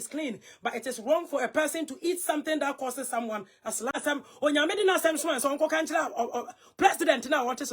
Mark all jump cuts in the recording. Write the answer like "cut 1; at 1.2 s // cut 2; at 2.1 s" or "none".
cut 1; at 3.9 s